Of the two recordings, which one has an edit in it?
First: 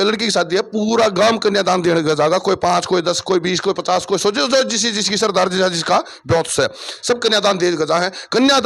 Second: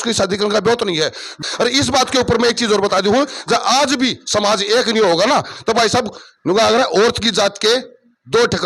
second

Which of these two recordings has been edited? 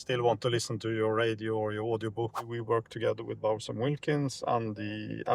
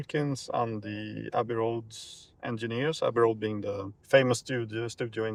first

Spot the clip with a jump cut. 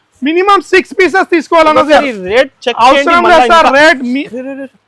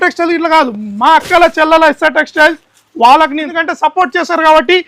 second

